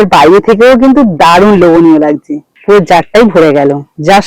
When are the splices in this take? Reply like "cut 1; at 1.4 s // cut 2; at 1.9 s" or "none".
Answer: none